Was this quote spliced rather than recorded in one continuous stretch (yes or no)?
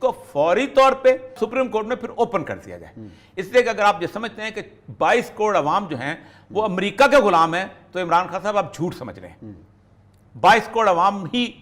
yes